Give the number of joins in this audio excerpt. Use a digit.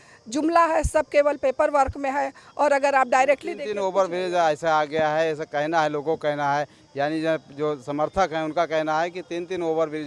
0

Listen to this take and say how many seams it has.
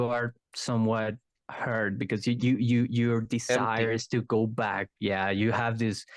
0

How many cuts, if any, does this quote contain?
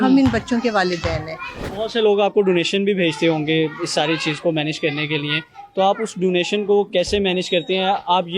1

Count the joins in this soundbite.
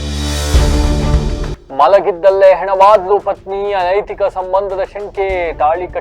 0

